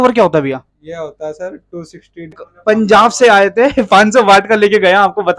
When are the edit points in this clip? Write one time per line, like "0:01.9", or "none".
0:02.5